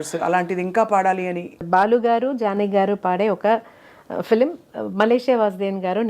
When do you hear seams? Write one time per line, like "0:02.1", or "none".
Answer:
0:01.6